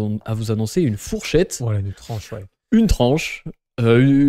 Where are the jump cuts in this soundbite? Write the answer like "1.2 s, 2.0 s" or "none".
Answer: none